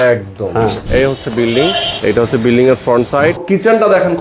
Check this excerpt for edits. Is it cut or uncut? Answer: cut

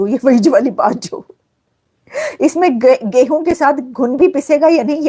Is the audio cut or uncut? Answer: uncut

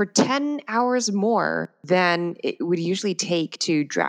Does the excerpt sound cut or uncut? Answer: cut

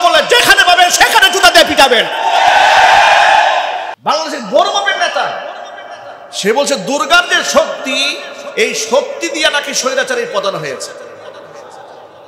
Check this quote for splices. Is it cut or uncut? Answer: cut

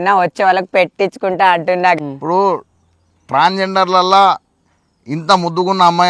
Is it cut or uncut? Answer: cut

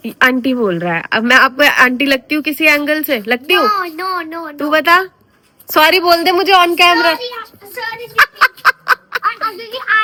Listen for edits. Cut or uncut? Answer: uncut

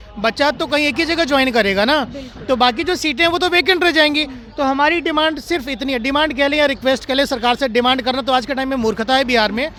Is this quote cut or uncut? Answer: uncut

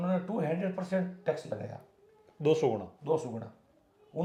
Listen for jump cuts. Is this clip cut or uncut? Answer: uncut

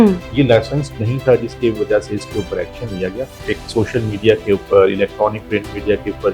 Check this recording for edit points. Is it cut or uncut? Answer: cut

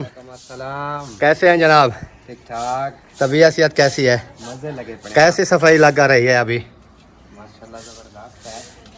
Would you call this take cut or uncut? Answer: uncut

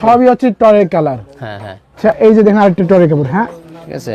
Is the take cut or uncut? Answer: cut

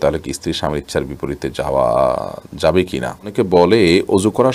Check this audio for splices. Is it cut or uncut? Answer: cut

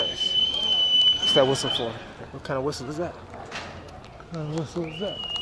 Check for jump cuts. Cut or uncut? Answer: uncut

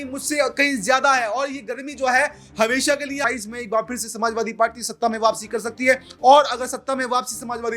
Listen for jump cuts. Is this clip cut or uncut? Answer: cut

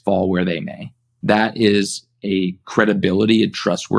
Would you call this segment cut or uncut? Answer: uncut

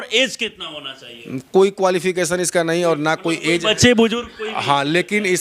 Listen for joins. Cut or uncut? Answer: uncut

